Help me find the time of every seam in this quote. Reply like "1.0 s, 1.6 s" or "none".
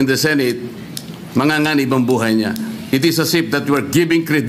1.0 s